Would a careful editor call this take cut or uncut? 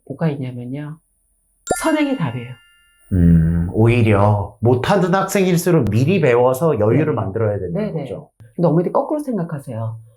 cut